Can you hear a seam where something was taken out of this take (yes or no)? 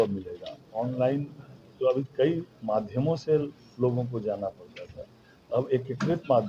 no